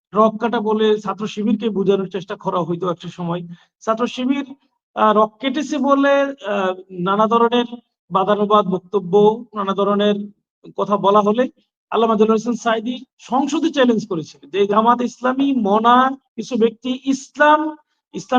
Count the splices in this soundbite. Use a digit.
1